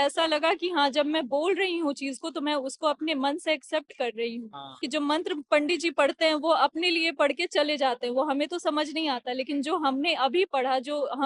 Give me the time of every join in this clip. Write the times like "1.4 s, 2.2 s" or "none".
4.8 s